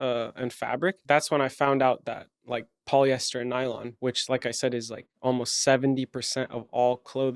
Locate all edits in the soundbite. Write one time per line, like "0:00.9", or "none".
0:01.0